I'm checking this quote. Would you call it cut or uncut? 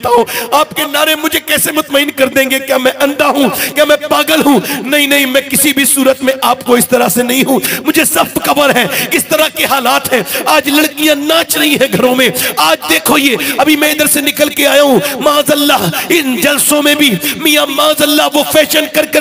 uncut